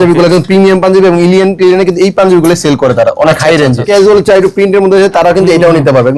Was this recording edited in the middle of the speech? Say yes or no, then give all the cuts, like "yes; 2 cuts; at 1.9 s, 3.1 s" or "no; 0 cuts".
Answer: yes; 1 cut; at 3.8 s